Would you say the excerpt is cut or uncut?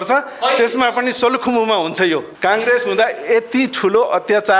cut